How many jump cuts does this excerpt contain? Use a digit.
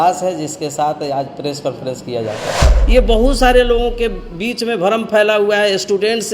1